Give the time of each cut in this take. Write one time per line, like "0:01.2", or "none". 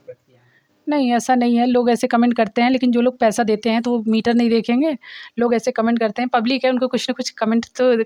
none